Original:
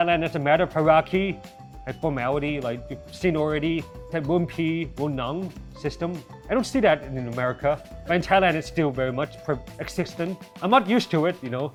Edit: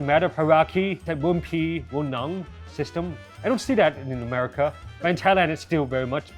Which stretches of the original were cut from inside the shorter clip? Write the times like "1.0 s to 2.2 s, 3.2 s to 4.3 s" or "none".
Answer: 1.4 s to 4.1 s